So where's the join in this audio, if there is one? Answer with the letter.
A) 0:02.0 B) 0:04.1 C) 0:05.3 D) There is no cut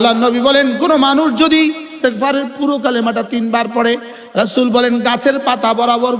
A